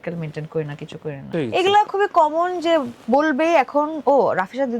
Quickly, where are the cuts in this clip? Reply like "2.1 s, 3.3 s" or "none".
1.3 s